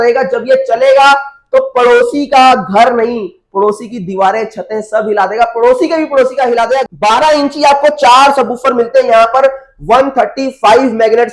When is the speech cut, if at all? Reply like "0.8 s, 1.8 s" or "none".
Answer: 6.8 s